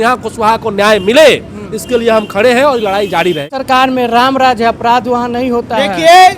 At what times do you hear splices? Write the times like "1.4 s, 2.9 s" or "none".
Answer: 3.5 s